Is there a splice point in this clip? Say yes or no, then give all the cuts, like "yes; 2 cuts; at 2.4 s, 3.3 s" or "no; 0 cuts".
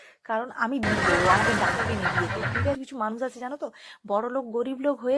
yes; 1 cut; at 2.8 s